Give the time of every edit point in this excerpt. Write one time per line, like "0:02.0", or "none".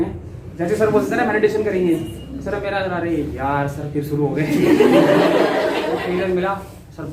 0:05.9